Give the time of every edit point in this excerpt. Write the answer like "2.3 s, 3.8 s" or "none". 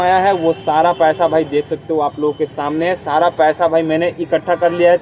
none